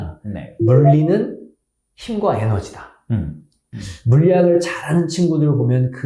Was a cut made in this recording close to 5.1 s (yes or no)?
no